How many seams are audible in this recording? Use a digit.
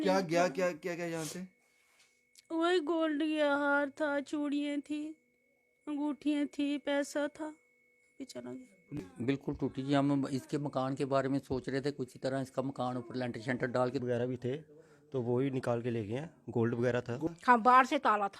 3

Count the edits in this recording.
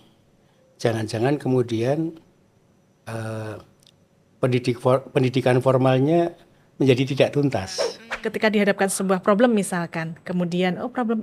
1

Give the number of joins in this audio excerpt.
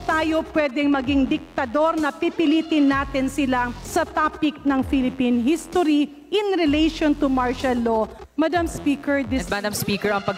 2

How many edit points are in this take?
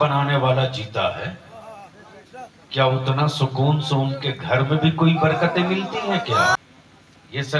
1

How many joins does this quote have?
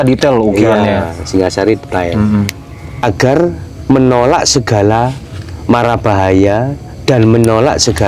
1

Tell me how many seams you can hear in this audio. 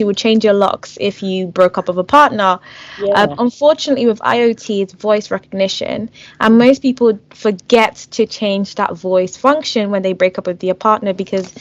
0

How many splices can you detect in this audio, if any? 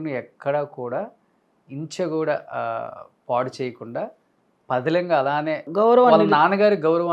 0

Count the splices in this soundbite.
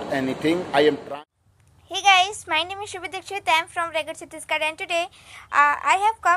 1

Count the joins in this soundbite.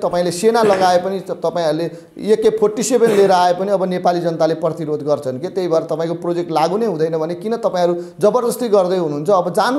0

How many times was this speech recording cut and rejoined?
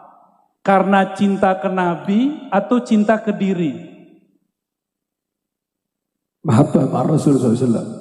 0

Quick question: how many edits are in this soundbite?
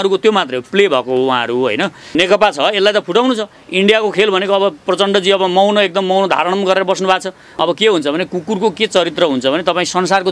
2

